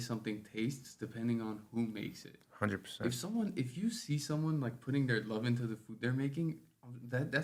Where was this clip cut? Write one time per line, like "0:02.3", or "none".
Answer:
none